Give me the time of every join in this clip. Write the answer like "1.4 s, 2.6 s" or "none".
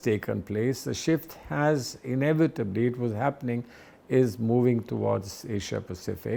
none